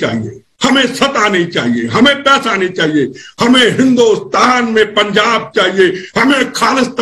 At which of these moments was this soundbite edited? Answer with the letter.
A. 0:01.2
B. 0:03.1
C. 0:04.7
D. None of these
D